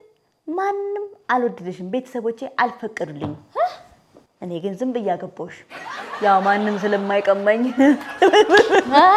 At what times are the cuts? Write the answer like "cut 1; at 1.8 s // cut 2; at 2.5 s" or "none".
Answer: none